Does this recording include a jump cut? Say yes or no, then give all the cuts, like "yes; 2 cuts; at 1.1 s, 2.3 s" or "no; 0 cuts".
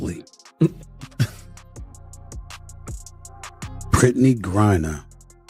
yes; 2 cuts; at 1.3 s, 3.9 s